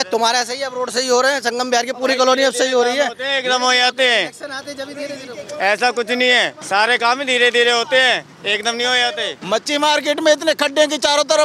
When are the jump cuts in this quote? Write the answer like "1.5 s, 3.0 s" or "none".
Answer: 6.6 s, 9.3 s